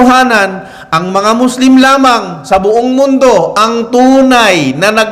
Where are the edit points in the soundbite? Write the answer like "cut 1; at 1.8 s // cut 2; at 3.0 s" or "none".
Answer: none